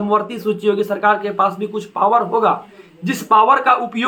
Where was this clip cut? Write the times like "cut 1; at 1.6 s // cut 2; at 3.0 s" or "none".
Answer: none